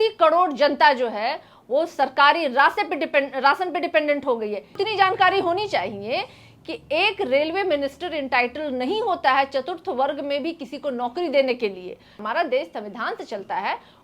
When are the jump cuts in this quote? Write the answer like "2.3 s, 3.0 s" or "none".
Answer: 4.8 s, 12.2 s

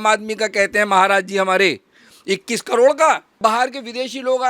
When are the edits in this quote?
3.4 s

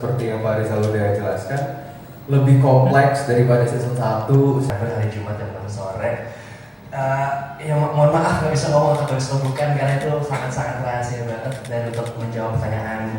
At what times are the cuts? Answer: 4.7 s

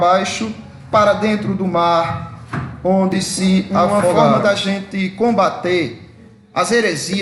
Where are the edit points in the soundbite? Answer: 4.4 s

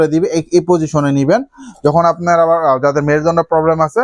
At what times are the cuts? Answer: none

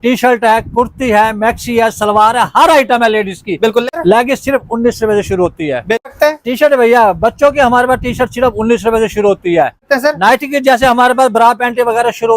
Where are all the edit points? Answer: 3.9 s, 6.1 s, 9.8 s

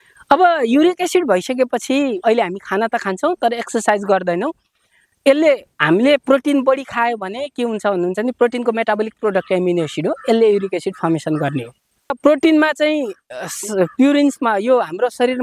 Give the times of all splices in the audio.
2.2 s, 12.2 s

